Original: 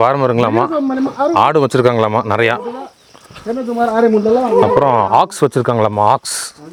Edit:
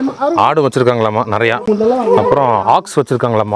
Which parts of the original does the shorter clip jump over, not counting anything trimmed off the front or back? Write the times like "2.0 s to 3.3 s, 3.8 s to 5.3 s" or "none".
2.6 s to 4.1 s